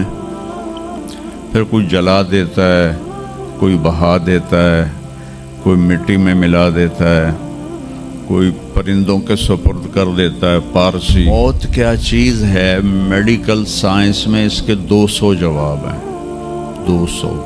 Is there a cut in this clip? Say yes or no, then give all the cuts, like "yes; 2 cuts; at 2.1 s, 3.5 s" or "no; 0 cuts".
yes; 1 cut; at 11.2 s